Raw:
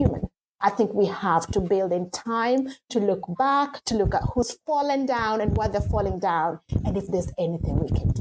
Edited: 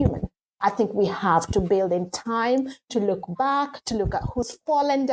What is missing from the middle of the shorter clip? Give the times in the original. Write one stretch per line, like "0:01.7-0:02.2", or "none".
none